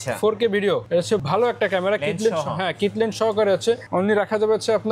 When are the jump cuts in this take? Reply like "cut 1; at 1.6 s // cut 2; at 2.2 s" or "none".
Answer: none